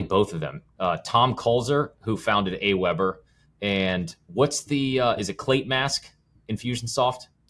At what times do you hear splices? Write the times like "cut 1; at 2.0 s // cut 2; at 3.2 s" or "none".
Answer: none